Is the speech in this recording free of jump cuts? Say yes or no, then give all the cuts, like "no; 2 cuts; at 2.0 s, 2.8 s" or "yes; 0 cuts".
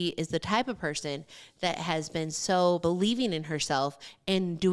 no; 1 cut; at 2.8 s